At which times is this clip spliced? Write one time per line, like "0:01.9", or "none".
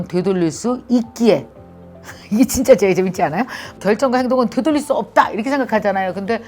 0:03.6